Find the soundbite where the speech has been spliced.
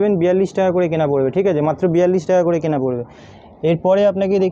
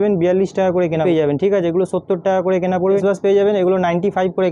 second; 2 cuts; at 1.0 s, 3.0 s

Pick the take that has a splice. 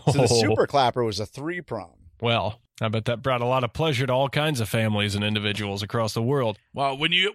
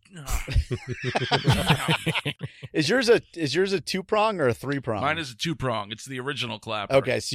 second; 1 cut; at 2.4 s

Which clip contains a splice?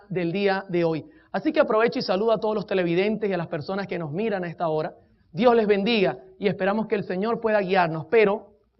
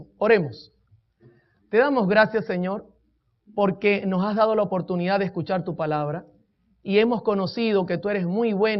first; 1 cut; at 3.8 s

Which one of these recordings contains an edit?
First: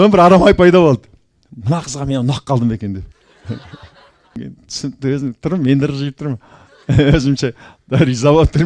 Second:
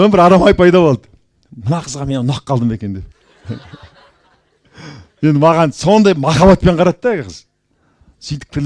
first; 1 cut; at 4.2 s

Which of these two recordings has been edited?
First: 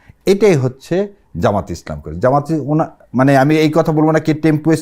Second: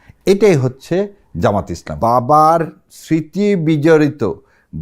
second; 1 cut; at 1.9 s

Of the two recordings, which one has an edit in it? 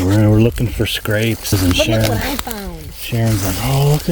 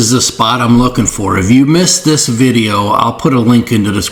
first; 1 cut; at 1.5 s

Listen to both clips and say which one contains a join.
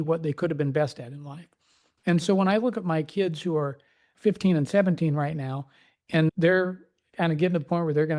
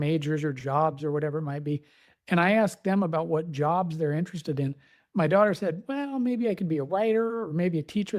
first; 2 cuts; at 4.1 s, 6.3 s

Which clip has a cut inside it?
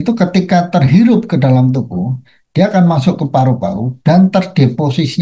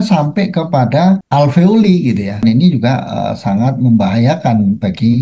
second; 2 cuts; at 1.2 s, 2.4 s

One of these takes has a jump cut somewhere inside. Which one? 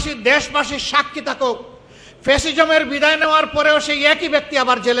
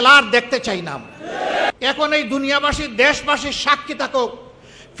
second; 1 cut; at 1.7 s

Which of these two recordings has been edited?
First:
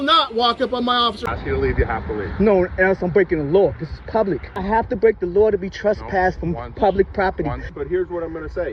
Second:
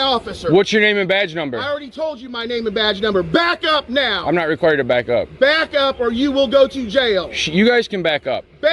first; 3 cuts; at 1.2 s, 4.4 s, 7.7 s

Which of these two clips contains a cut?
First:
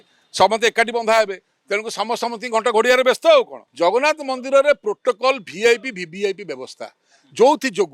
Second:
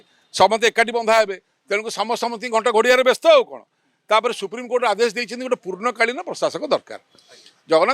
first; 1 cut; at 3.6 s

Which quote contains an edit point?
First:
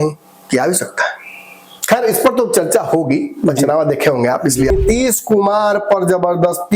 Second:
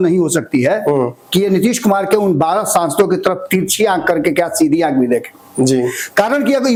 first; 1 cut; at 4.7 s

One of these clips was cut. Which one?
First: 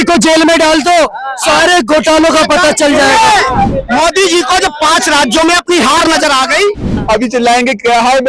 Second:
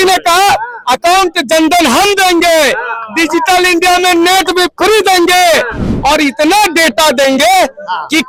first; 2 cuts; at 3.7 s, 6.9 s

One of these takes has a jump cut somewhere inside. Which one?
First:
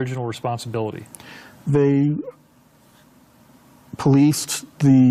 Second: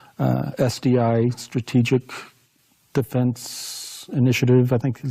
second; 1 cut; at 1.5 s

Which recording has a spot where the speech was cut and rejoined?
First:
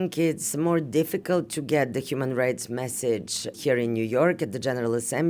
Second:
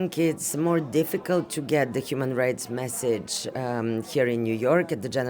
first; 1 cut; at 3.6 s

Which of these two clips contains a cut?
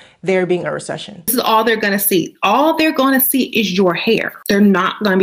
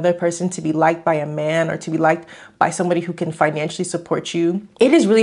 first; 1 cut; at 1.1 s

